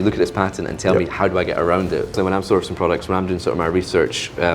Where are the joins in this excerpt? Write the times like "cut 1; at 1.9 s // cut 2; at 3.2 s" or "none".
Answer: cut 1; at 2.1 s

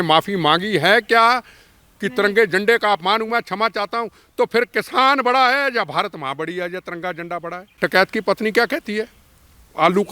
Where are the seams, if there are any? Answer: cut 1; at 7.7 s

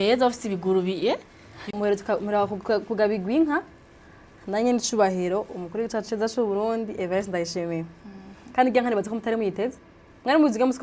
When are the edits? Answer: cut 1; at 1.7 s

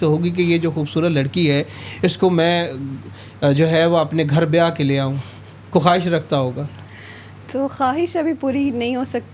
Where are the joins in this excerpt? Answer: none

